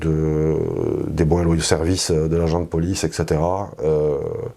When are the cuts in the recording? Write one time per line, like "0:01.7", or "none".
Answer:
none